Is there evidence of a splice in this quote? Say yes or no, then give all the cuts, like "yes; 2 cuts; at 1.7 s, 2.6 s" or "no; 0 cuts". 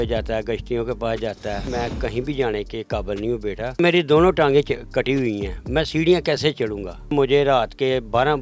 yes; 3 cuts; at 1.6 s, 3.8 s, 7.1 s